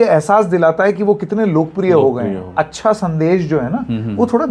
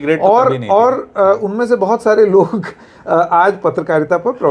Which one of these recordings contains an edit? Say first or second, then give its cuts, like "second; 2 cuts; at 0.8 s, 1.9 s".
first; 1 cut; at 2.5 s